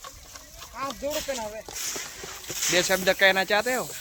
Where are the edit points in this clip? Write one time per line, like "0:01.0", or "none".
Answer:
none